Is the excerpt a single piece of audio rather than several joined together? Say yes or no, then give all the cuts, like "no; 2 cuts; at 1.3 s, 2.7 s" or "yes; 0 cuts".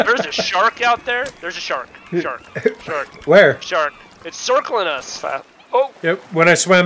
no; 1 cut; at 5.1 s